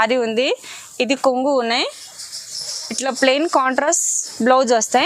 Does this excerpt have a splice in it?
no; 0 cuts

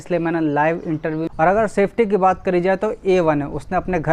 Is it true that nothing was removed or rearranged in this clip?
no; 1 cut; at 1.3 s

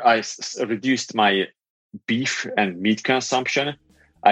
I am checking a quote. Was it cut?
no; 0 cuts

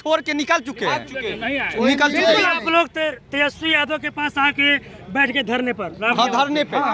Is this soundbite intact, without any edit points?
yes; 0 cuts

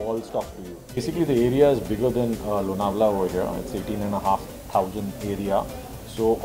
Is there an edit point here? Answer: yes; 1 cut; at 1.0 s

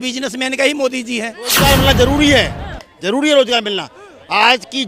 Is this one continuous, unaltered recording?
no; 1 cut; at 1.6 s

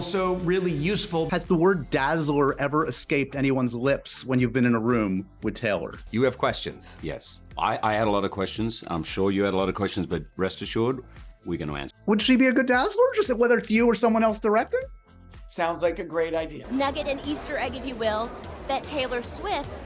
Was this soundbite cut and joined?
no; 0 cuts

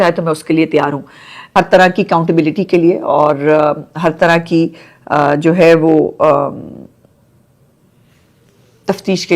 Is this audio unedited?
no; 1 cut; at 1.4 s

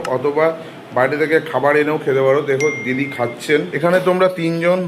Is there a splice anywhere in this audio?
yes; 1 cut; at 3.7 s

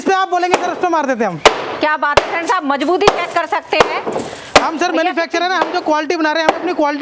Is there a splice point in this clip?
no; 0 cuts

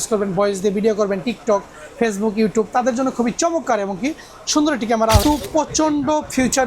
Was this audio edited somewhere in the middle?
yes; 1 cut; at 5.2 s

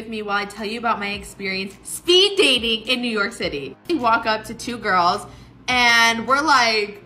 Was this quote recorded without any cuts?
no; 1 cut; at 3.8 s

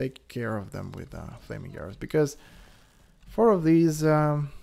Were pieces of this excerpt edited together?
no; 0 cuts

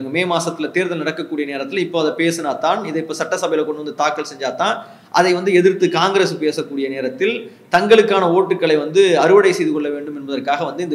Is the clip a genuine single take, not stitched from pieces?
yes; 0 cuts

